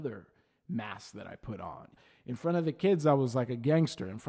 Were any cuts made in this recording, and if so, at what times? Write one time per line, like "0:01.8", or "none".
0:01.9